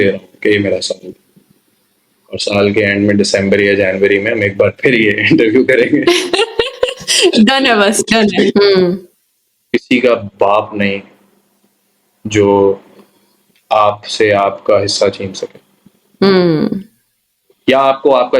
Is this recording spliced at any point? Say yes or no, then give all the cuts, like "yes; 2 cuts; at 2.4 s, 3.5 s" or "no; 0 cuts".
yes; 1 cut; at 8.7 s